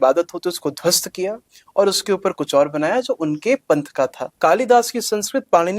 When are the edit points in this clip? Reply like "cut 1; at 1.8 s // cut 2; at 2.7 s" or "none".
cut 1; at 4.2 s

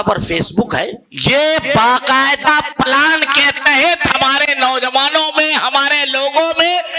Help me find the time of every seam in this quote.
cut 1; at 1.0 s

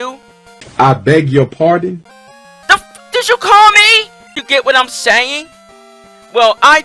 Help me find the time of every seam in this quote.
cut 1; at 4.4 s

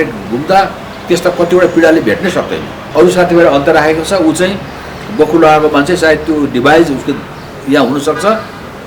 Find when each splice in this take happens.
cut 1; at 2.8 s

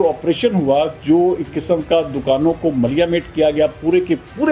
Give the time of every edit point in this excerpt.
none

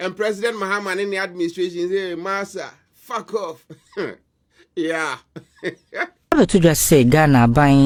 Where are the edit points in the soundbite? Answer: none

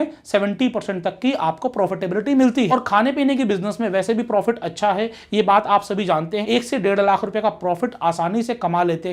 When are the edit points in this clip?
cut 1; at 2.7 s // cut 2; at 6.4 s

